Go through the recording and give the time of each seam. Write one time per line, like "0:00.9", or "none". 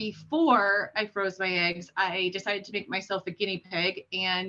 none